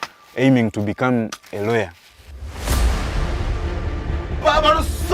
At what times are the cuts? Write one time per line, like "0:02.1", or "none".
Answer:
0:01.2